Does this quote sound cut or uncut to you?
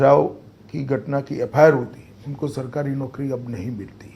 uncut